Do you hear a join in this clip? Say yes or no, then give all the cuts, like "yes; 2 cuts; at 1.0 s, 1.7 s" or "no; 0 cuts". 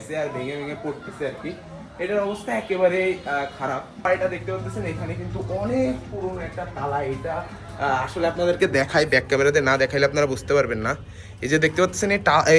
yes; 1 cut; at 4.0 s